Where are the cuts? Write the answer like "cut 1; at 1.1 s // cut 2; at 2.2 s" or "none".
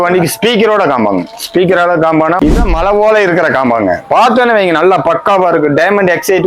cut 1; at 2.4 s